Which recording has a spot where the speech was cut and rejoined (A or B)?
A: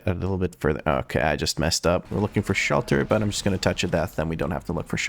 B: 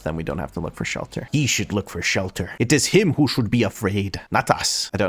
A